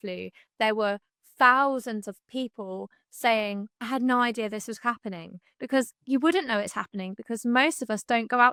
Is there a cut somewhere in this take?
no; 0 cuts

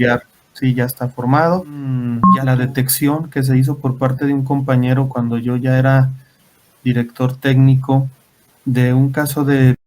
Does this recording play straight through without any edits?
no; 1 cut; at 2.2 s

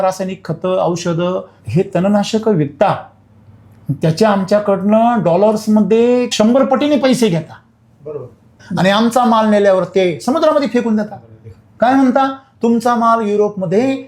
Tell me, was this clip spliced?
yes; 2 cuts; at 1.5 s, 8.6 s

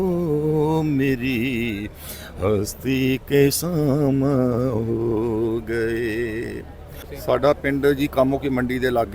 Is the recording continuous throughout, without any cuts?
no; 1 cut; at 7.1 s

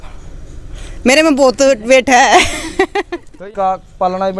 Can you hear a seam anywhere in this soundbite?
yes; 1 cut; at 3.3 s

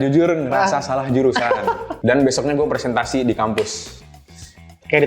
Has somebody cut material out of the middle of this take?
yes; 1 cut; at 1.9 s

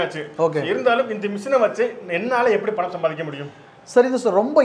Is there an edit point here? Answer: no; 0 cuts

